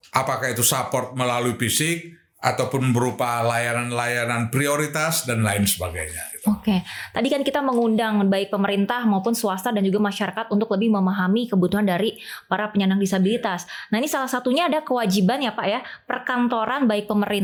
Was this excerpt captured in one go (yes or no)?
yes